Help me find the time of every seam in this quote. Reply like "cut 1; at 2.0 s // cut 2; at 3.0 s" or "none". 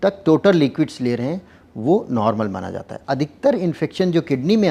cut 1; at 2.9 s